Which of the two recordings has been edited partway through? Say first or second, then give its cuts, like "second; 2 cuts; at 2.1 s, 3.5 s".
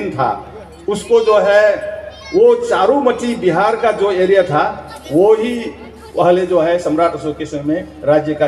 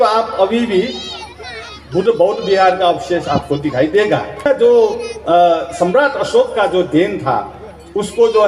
second; 1 cut; at 4.5 s